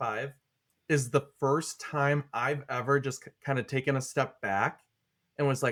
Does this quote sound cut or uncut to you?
uncut